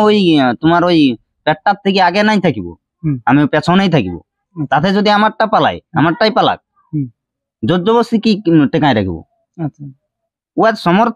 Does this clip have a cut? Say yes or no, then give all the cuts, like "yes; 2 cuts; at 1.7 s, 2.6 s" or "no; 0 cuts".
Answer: no; 0 cuts